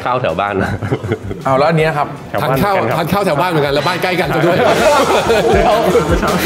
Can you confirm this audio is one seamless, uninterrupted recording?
yes; 0 cuts

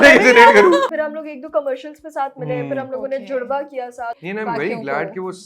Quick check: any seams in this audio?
yes; 2 cuts; at 0.9 s, 4.2 s

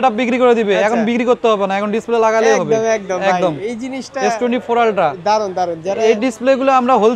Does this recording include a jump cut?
no; 0 cuts

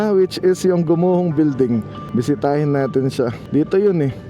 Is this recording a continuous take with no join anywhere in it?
no; 2 cuts; at 2.0 s, 3.4 s

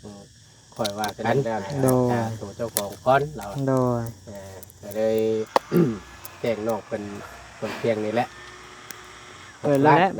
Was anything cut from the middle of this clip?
yes; 1 cut; at 2.4 s

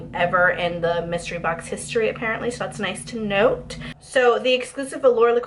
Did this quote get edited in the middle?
yes; 1 cut; at 3.9 s

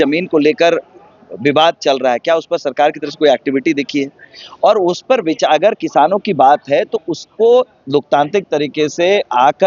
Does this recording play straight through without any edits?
yes; 0 cuts

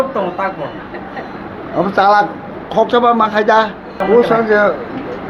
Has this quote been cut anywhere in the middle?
yes; 1 cut; at 4.0 s

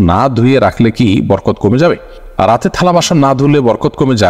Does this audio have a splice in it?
no; 0 cuts

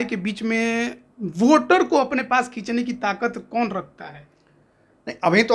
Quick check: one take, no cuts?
yes; 0 cuts

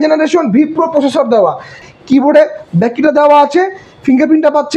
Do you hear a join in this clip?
yes; 1 cut; at 1.8 s

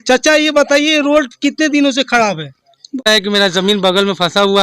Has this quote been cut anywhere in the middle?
yes; 1 cut; at 3.1 s

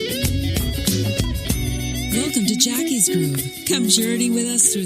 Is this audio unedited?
yes; 0 cuts

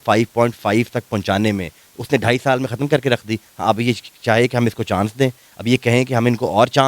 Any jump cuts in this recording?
no; 0 cuts

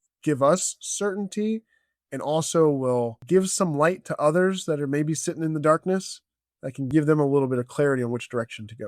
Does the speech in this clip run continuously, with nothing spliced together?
no; 2 cuts; at 3.2 s, 6.9 s

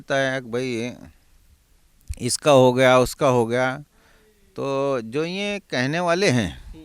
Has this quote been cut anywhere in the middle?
no; 0 cuts

